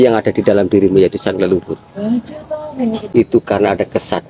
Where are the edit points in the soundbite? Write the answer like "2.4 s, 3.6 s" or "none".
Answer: 3.0 s